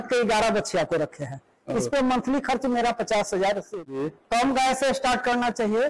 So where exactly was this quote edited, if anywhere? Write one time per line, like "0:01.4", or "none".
0:03.7